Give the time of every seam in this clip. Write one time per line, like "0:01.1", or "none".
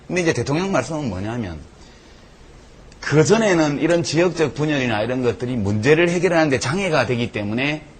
0:05.5